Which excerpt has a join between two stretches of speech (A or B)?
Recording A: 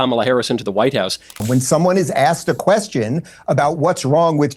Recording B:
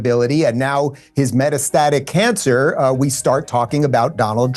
A